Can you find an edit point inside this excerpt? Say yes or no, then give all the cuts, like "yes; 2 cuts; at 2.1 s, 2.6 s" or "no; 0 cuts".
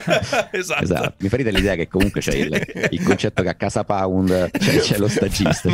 yes; 2 cuts; at 1.2 s, 4.5 s